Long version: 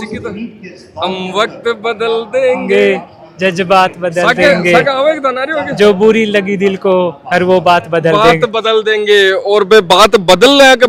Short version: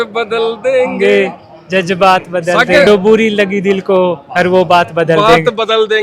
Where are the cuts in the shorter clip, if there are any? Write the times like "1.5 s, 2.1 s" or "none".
2.9 s